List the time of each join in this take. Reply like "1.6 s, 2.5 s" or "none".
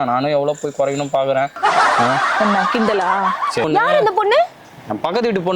3.6 s